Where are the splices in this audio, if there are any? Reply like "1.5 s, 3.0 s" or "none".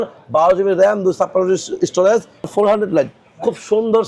2.5 s